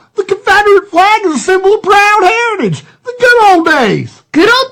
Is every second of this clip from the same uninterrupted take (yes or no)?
yes